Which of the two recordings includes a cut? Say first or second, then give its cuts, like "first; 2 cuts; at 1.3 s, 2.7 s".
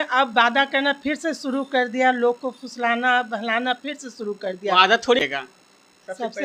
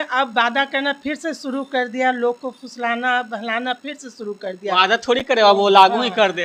first; 1 cut; at 5.2 s